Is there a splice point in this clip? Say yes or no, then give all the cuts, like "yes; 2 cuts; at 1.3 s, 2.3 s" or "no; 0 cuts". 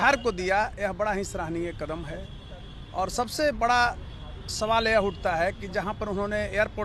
no; 0 cuts